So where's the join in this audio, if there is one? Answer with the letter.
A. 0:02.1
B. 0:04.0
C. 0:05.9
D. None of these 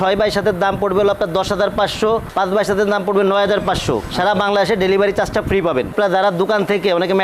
C